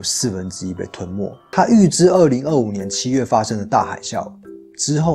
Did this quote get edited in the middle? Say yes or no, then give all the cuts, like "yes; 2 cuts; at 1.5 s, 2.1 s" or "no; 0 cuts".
yes; 1 cut; at 1.4 s